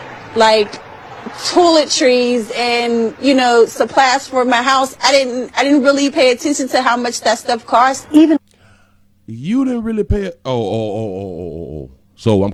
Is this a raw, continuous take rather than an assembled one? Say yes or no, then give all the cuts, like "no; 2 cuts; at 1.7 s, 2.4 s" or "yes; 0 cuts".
yes; 0 cuts